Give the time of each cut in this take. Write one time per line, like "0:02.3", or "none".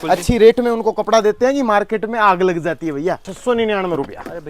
0:03.3